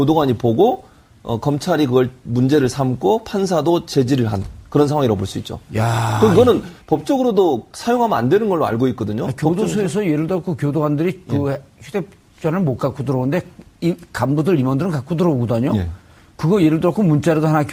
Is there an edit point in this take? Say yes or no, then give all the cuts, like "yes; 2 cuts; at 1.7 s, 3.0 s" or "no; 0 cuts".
no; 0 cuts